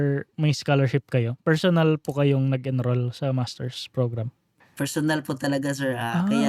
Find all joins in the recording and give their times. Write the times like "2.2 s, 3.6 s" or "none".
4.5 s